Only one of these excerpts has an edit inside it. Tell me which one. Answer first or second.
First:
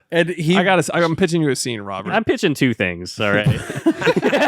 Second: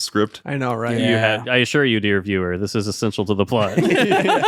first